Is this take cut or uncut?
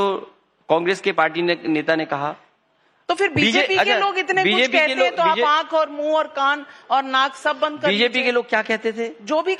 uncut